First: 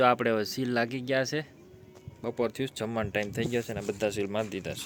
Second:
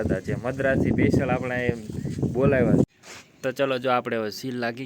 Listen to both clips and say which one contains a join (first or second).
second